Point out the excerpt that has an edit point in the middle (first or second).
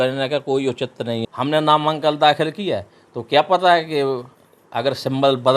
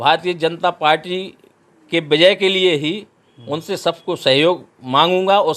first